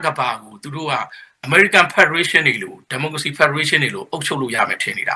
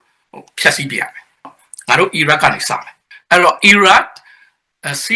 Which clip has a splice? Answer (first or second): second